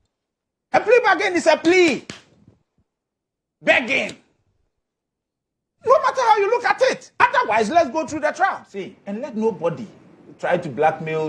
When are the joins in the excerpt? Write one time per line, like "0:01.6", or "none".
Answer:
0:09.0